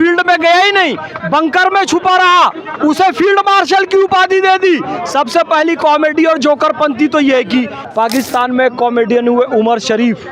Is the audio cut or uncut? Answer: cut